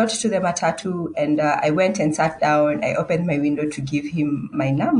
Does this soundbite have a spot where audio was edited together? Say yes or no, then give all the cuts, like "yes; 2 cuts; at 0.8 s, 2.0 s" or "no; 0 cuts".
no; 0 cuts